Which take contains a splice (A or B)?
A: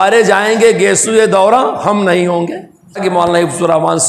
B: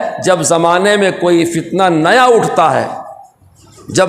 A